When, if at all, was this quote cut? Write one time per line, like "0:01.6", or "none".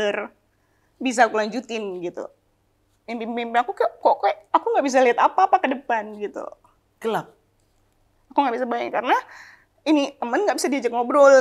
none